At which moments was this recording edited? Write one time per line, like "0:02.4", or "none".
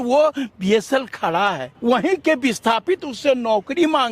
0:01.7